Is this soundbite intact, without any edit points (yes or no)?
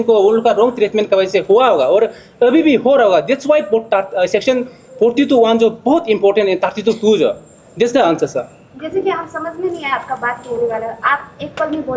yes